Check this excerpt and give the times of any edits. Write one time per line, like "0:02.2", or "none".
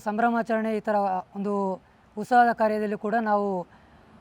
none